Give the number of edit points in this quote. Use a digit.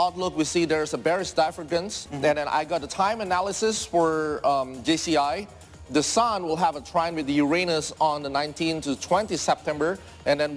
1